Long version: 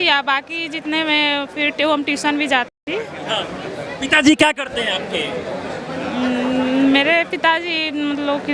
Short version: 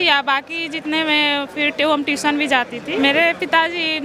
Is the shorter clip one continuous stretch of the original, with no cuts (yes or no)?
no